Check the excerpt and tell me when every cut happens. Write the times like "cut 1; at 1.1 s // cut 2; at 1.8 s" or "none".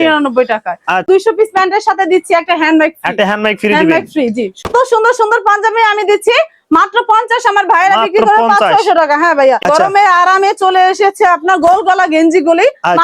cut 1; at 1.0 s // cut 2; at 4.6 s // cut 3; at 9.6 s